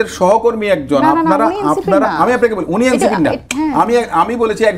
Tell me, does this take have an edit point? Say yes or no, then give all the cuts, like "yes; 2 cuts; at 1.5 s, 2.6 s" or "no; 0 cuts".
no; 0 cuts